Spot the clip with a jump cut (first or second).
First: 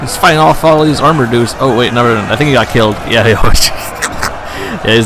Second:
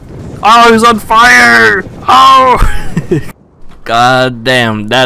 second